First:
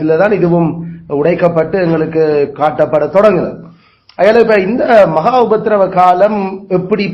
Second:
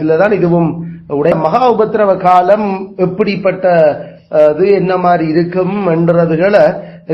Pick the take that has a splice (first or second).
second